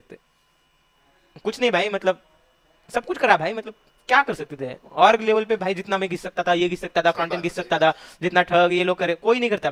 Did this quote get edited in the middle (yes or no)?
no